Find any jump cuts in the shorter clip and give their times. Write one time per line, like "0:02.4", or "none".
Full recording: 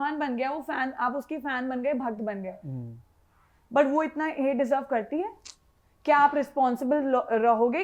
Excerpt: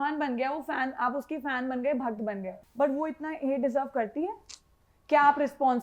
0:02.6